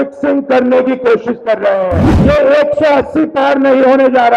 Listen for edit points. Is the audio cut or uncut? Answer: cut